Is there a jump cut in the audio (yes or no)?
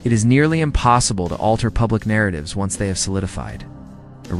yes